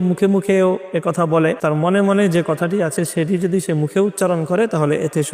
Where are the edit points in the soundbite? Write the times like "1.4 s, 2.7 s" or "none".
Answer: 1.6 s